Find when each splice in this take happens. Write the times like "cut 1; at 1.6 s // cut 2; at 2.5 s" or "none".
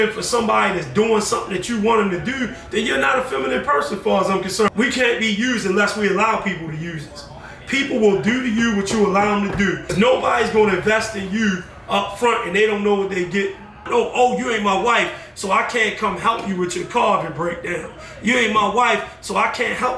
cut 1; at 4.7 s // cut 2; at 9.9 s // cut 3; at 13.8 s